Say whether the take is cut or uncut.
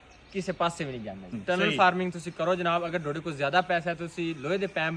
cut